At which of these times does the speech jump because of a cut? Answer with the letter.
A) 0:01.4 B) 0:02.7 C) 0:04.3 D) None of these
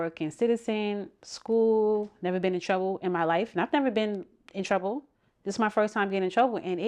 D